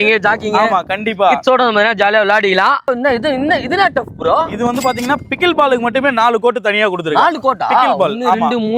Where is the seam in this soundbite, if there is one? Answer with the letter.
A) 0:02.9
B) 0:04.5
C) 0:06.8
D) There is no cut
A